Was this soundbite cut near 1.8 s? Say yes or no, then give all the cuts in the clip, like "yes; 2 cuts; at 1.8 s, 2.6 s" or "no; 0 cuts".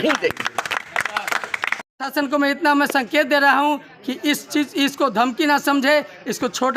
yes; 1 cut; at 1.8 s